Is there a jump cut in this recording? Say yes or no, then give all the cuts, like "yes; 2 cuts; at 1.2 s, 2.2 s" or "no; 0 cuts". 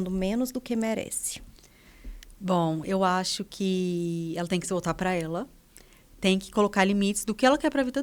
no; 0 cuts